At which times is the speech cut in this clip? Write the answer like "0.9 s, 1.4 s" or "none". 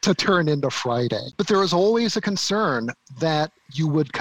1.3 s